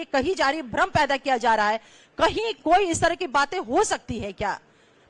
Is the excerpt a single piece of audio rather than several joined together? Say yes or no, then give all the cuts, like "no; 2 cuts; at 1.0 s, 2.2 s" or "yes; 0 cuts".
yes; 0 cuts